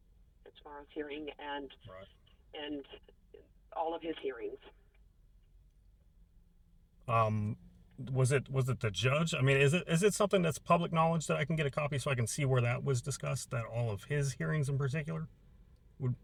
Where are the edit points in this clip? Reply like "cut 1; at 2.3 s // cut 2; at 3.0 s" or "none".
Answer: none